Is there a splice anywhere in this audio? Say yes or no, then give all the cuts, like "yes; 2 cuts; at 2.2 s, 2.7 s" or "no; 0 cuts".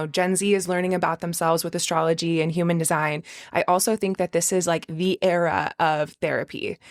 no; 0 cuts